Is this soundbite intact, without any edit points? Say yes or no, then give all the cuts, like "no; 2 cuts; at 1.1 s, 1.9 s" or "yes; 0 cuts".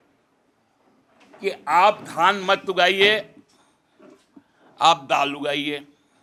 yes; 0 cuts